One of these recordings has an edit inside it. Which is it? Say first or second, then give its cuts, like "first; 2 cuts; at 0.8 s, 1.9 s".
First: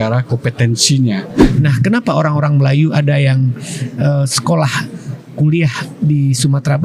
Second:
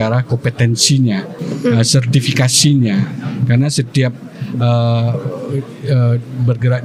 first; 1 cut; at 1.4 s